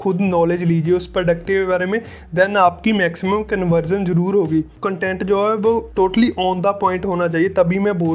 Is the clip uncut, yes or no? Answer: no